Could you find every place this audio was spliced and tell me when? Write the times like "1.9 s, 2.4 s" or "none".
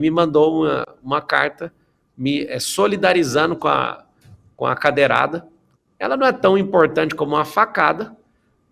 none